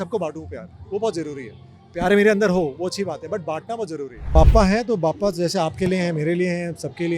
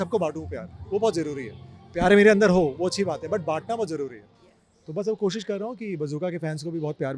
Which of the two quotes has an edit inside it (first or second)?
first